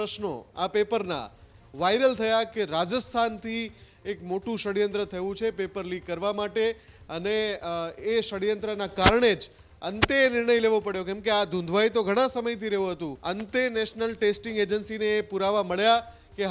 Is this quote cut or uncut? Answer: cut